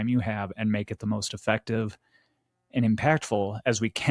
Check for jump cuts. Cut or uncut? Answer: uncut